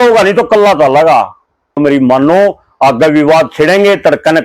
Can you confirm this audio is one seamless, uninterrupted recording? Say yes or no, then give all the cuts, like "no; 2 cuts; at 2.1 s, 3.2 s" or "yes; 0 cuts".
no; 1 cut; at 1.8 s